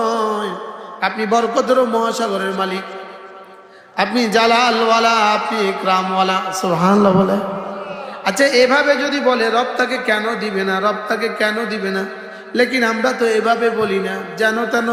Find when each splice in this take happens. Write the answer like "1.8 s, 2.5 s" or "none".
none